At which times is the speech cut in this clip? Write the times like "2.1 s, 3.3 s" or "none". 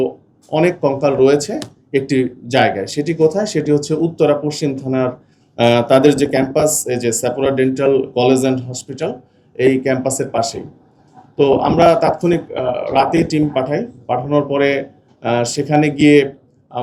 none